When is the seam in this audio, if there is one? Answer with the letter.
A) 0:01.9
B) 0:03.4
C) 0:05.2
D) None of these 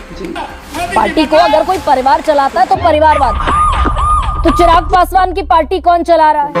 D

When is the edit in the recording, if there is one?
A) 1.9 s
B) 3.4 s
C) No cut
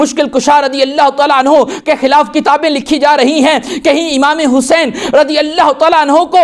C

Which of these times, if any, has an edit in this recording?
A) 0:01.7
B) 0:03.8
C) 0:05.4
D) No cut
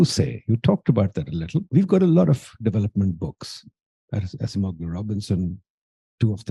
A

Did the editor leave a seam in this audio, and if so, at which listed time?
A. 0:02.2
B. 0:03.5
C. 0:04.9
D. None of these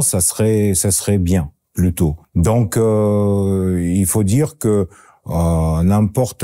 A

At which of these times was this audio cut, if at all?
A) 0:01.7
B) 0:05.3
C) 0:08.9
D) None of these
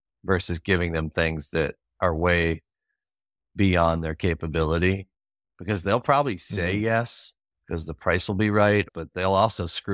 C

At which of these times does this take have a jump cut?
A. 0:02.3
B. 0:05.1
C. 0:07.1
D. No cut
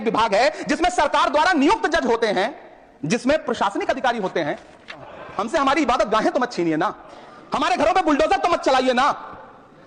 B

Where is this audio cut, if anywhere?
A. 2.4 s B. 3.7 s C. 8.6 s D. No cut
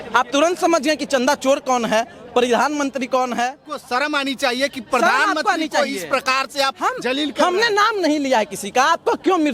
B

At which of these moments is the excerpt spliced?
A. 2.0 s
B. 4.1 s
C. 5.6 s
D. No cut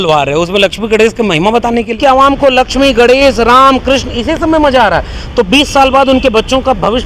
A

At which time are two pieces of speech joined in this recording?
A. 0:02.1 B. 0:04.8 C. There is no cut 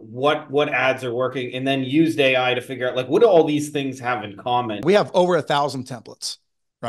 B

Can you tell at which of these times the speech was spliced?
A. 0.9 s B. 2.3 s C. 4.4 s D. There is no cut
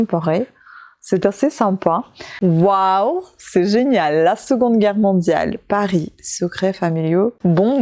B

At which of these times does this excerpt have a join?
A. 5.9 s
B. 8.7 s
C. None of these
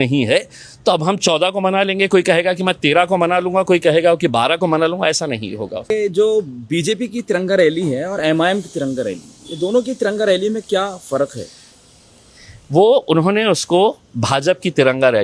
A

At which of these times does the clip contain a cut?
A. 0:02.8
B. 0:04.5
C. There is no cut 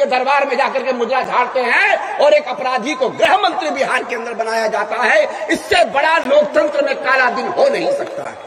C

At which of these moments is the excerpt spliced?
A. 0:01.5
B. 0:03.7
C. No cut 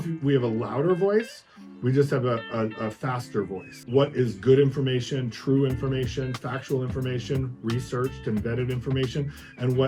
B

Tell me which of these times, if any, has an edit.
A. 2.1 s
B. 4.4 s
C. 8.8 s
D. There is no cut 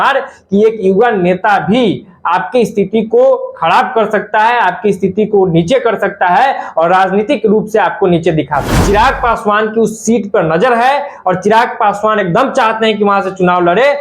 C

